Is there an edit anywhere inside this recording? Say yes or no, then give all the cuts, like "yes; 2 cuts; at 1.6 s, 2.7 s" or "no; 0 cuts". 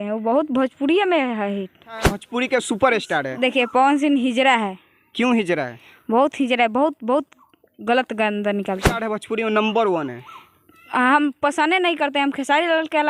yes; 2 cuts; at 2.2 s, 9.0 s